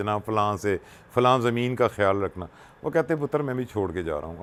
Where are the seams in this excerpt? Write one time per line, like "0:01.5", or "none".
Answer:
none